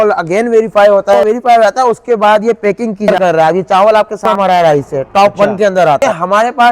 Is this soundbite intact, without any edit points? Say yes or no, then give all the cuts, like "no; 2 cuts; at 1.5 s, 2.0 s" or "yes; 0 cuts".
no; 4 cuts; at 1.2 s, 3.1 s, 4.3 s, 6.0 s